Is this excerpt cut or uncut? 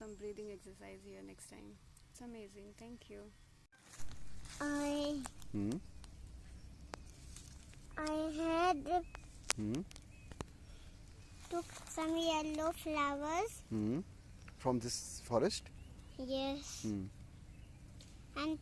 cut